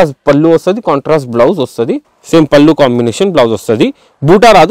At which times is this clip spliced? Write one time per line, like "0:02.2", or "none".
0:02.1

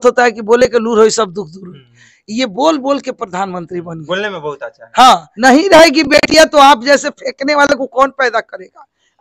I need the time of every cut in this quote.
0:05.3

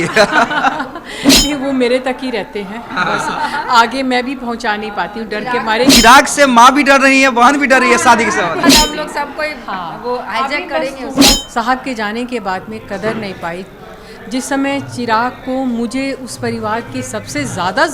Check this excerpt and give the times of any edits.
0:05.9
0:08.6
0:11.4

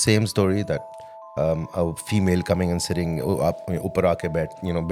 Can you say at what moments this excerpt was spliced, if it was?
none

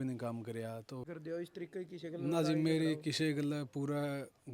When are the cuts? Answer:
0:01.1

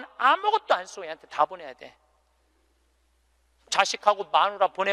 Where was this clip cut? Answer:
0:03.6

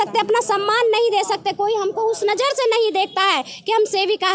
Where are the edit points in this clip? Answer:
none

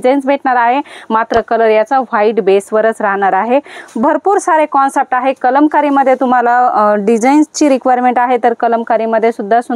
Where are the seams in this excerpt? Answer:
none

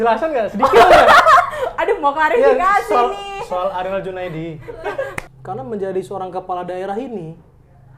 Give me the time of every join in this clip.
0:05.2

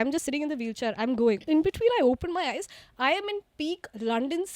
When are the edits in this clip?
0:01.4

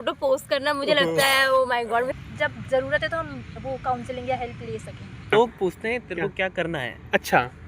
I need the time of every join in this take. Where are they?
0:02.2
0:05.3

